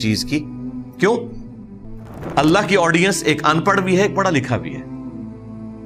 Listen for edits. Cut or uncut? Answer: uncut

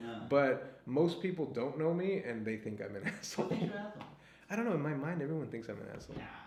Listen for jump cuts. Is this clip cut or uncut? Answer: uncut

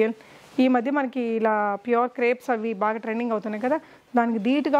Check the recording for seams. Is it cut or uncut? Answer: uncut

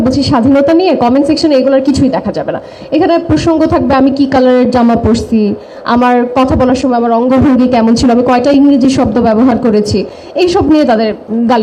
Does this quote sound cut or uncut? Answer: uncut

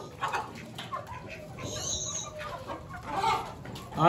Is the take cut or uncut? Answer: uncut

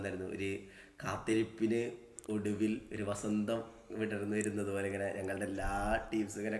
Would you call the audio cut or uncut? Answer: uncut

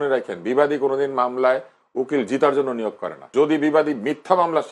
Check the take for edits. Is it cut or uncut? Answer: cut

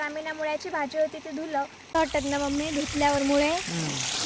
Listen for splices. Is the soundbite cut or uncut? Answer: cut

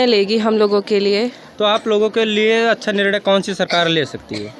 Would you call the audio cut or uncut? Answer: uncut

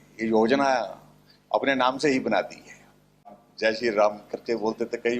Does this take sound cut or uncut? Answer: cut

